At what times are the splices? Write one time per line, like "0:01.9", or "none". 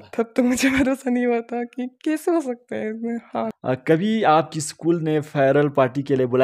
0:03.5